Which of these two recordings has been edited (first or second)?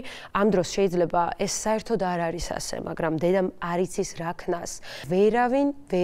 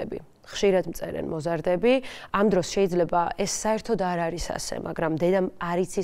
first